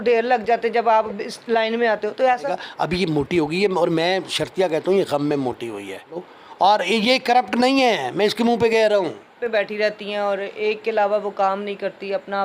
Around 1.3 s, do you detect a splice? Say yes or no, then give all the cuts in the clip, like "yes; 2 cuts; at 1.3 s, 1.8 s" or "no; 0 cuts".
no; 3 cuts; at 2.6 s, 6.3 s, 9.4 s